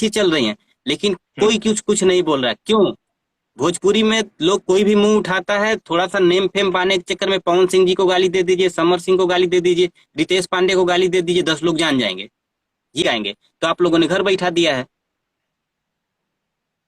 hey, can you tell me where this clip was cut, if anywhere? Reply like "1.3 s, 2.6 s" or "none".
13.0 s